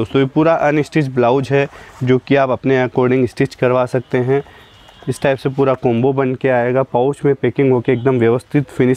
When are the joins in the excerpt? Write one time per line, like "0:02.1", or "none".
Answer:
none